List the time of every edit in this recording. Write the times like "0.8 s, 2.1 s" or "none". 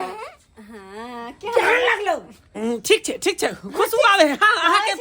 2.5 s